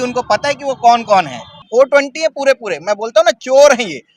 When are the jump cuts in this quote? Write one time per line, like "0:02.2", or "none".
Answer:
0:01.6

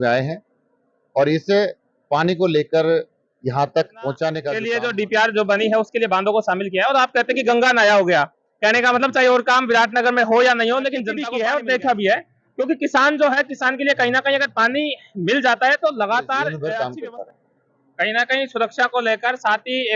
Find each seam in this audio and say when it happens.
0:04.6
0:11.2
0:16.5

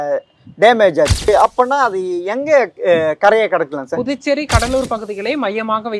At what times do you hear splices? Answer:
0:01.3

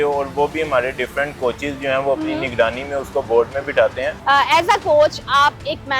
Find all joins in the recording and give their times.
0:04.1

